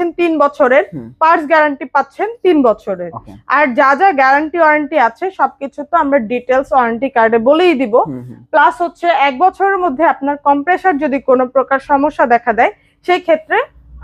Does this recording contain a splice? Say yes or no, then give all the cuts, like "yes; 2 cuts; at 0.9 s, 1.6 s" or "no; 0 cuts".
no; 0 cuts